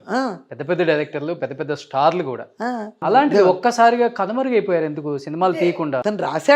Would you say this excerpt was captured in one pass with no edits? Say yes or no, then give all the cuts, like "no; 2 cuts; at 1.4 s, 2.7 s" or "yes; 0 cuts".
no; 2 cuts; at 3.0 s, 5.5 s